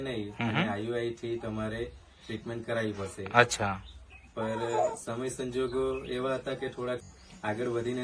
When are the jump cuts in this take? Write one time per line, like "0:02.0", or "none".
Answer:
0:07.0